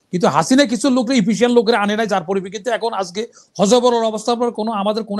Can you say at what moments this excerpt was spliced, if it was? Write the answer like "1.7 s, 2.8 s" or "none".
none